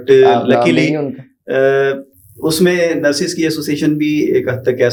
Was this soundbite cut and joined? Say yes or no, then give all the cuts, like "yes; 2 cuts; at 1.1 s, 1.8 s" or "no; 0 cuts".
no; 0 cuts